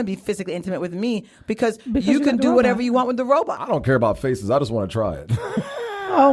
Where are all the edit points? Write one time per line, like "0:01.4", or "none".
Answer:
0:03.8